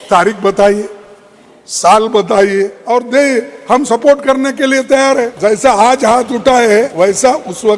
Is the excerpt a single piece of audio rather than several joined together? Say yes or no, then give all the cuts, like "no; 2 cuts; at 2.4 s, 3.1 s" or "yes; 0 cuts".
no; 3 cuts; at 2.8 s, 5.3 s, 6.9 s